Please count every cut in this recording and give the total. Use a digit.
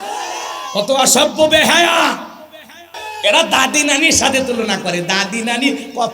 1